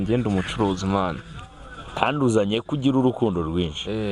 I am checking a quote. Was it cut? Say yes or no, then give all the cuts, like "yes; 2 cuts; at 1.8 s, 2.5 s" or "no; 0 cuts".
yes; 1 cut; at 1.8 s